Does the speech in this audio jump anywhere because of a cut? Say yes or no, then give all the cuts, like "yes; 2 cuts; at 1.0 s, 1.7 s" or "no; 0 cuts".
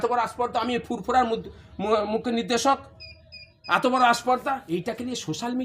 yes; 1 cut; at 4.7 s